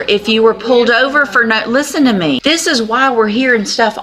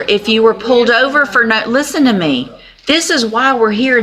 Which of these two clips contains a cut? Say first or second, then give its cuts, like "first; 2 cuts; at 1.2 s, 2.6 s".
first; 1 cut; at 2.4 s